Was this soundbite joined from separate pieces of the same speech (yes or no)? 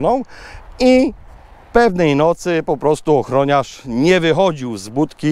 no